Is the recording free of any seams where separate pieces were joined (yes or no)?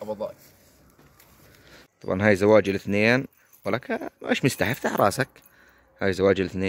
no